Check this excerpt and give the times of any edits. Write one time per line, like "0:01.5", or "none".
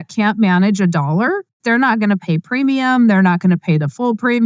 0:01.6